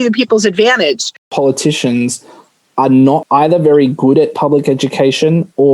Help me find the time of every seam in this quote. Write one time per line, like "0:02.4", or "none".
0:01.3
0:03.2